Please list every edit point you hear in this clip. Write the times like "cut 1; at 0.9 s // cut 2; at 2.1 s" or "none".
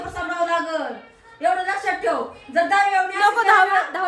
none